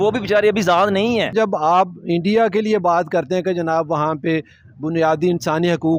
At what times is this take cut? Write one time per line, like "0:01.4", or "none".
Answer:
0:01.3